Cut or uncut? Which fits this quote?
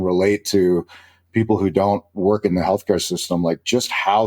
uncut